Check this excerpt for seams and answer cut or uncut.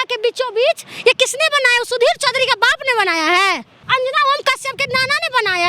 cut